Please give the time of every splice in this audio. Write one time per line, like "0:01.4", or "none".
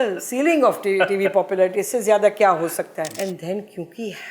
0:03.1